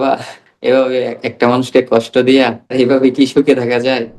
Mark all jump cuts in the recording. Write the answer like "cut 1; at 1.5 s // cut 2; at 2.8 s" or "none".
cut 1; at 2.7 s